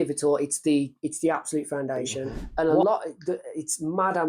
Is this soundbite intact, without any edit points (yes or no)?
no